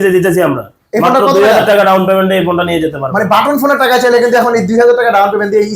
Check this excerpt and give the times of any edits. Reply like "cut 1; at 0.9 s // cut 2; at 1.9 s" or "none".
none